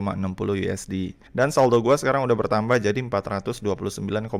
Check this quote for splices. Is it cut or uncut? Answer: cut